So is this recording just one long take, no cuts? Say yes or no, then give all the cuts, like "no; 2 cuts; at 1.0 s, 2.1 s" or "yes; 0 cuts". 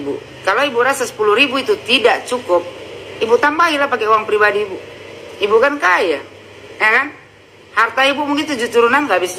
yes; 0 cuts